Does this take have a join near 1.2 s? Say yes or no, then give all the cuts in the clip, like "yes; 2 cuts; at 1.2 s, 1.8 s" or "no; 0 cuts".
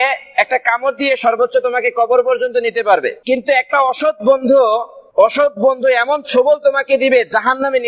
no; 2 cuts; at 3.2 s, 5.0 s